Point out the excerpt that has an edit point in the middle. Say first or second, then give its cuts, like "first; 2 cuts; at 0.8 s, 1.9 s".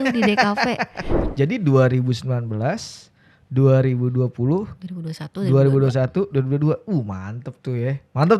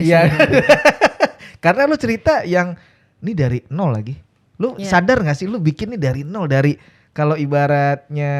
first; 1 cut; at 1.0 s